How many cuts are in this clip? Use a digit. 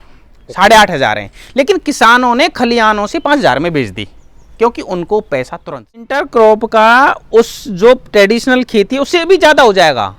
1